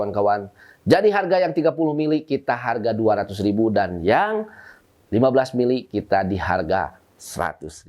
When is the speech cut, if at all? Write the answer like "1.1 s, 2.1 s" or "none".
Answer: none